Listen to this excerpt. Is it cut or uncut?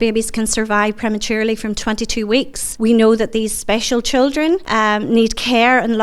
cut